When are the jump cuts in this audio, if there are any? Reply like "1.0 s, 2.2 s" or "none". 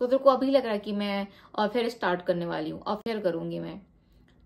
none